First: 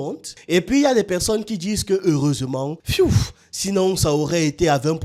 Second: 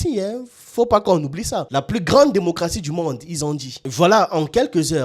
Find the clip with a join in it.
second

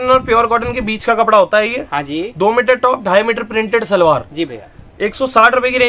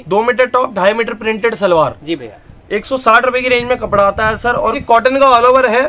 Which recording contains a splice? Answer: second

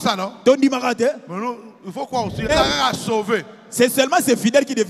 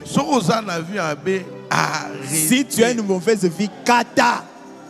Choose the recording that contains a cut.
first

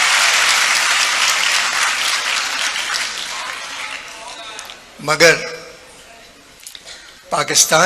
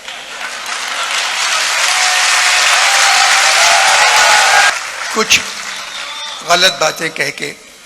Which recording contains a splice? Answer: second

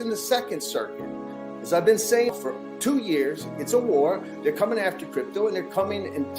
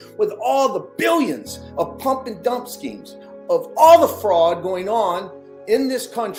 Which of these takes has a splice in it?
first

